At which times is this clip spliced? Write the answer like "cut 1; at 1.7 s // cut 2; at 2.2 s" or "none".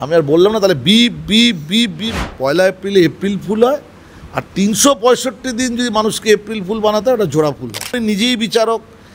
cut 1; at 2.1 s // cut 2; at 8.0 s